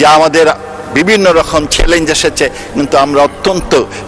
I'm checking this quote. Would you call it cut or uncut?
uncut